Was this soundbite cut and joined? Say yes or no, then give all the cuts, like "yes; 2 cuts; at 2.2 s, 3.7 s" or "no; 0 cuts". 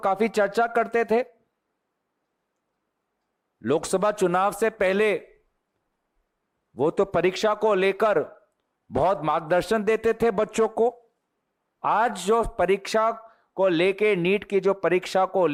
no; 0 cuts